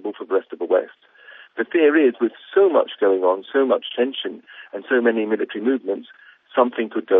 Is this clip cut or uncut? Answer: uncut